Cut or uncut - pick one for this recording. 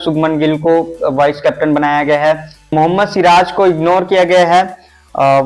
cut